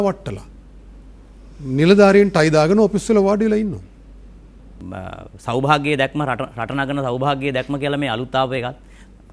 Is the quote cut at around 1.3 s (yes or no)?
no